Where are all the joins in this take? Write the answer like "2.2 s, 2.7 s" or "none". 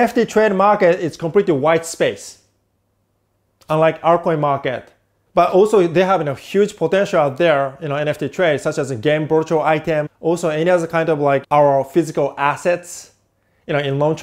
10.1 s